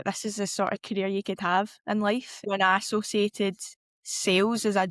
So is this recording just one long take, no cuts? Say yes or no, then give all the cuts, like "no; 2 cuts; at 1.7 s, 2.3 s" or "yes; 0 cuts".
no; 1 cut; at 2.4 s